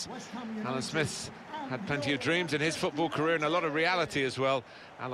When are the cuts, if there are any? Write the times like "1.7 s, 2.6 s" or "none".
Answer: none